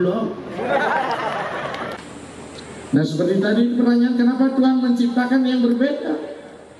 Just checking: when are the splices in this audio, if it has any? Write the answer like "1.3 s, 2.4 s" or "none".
2.0 s

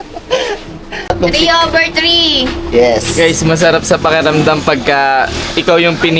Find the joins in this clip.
1.1 s

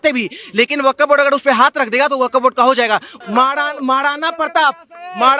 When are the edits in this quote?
3.1 s

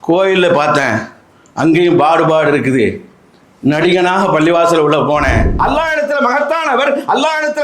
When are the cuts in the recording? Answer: 5.5 s

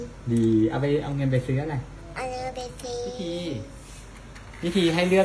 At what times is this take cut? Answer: 3.2 s

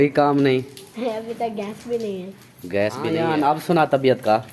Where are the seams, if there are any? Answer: 3.2 s

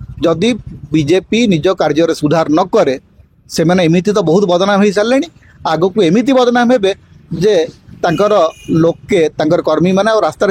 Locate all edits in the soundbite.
none

